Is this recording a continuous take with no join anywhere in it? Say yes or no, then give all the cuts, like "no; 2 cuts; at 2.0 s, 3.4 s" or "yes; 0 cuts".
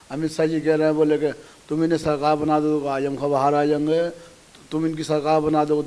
yes; 0 cuts